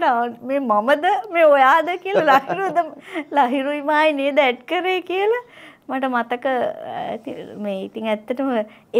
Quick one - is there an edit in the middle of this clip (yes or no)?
no